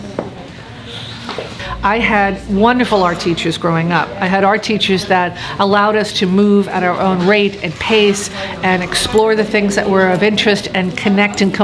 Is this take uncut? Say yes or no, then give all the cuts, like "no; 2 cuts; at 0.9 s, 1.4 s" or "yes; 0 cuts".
no; 1 cut; at 1.6 s